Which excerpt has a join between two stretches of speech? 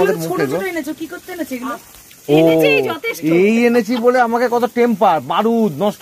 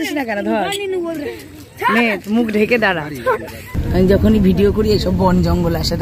second; 1 cut; at 3.7 s

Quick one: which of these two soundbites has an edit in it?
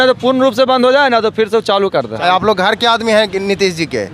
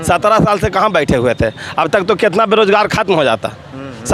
first; 1 cut; at 2.2 s

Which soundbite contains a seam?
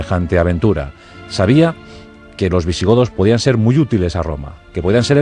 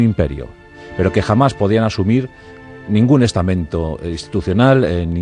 second; 1 cut; at 3.9 s

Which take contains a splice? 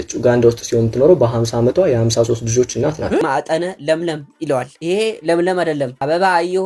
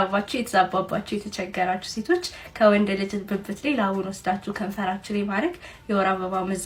first; 1 cut; at 3.2 s

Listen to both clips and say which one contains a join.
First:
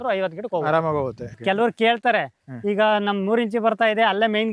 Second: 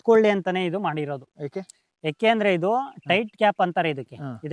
first; 1 cut; at 1.4 s

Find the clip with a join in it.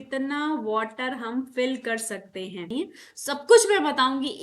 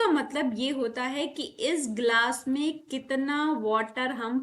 first; 1 cut; at 2.6 s

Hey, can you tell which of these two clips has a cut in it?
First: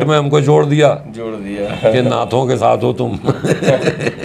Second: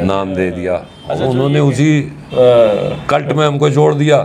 second; 1 cut; at 1.0 s

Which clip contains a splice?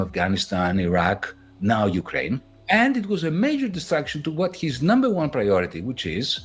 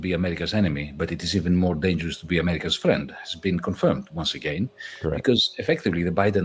first; 1 cut; at 2.4 s

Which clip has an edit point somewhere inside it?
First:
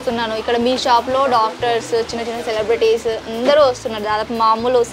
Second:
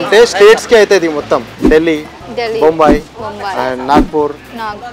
second; 1 cut; at 1.5 s

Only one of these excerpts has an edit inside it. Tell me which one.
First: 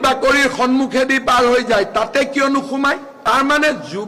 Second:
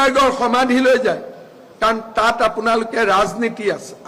first; 1 cut; at 3.1 s

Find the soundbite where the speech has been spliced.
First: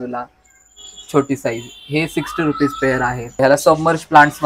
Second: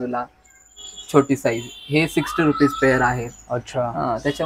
first; 1 cut; at 3.4 s

